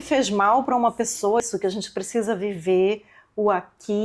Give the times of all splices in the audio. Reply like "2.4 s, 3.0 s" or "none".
1.4 s